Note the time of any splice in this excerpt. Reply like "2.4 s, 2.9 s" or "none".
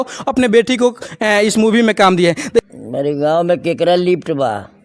2.6 s